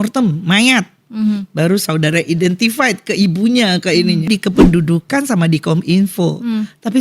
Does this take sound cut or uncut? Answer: cut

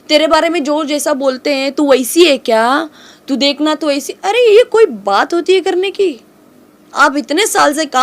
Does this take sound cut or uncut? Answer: uncut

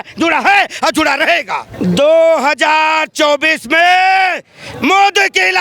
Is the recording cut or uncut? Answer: cut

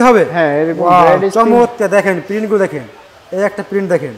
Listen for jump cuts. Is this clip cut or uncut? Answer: uncut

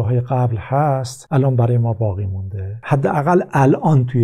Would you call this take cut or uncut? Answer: cut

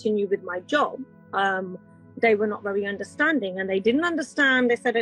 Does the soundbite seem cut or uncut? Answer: uncut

